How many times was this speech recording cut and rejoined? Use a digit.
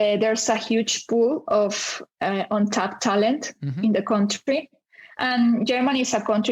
0